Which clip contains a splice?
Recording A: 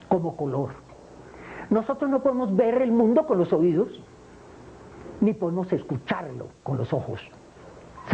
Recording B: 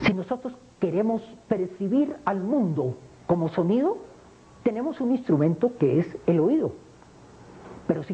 B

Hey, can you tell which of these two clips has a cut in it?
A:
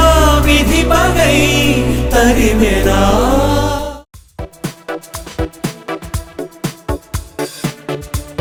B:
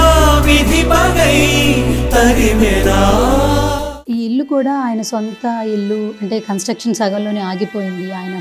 B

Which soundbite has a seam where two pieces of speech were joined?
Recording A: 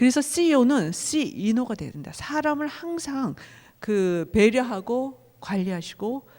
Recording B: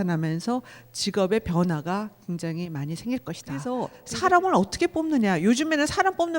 B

